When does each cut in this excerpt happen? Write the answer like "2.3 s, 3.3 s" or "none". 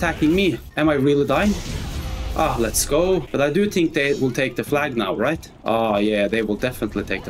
none